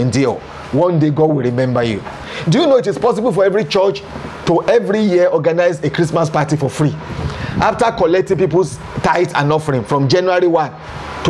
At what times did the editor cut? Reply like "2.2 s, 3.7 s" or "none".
2.3 s

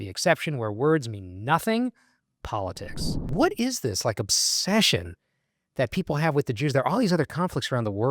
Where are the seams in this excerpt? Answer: 3.3 s

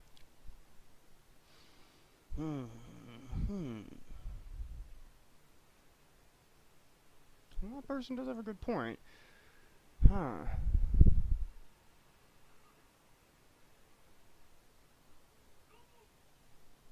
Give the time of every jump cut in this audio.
1.9 s

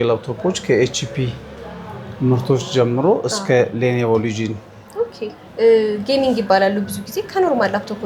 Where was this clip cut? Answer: 5.4 s

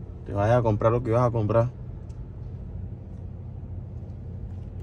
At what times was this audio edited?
none

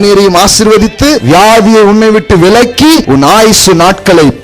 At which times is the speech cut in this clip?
1.2 s, 3.0 s

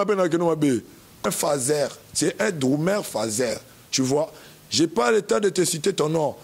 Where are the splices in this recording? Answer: 1.2 s

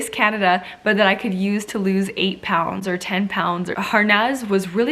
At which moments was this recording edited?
3.8 s

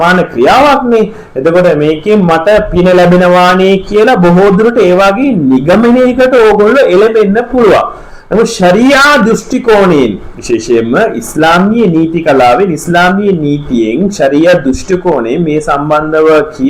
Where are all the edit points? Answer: none

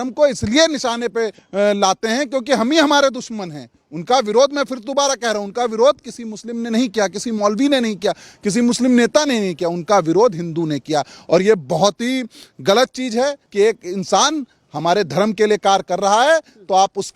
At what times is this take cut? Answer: 1.4 s, 13.4 s

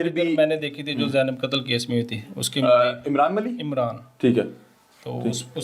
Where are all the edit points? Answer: none

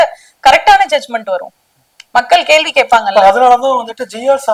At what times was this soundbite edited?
none

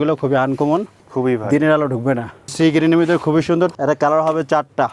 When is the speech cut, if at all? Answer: 1.1 s, 2.5 s, 3.7 s

